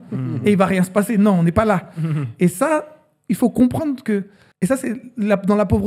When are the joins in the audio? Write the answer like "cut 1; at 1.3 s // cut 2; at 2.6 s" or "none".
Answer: cut 1; at 4.4 s